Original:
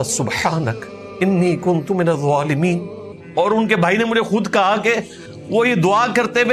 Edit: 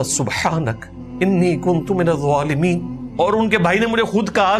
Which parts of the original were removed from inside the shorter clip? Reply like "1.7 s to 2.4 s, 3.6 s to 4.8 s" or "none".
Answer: 3.0 s to 3.1 s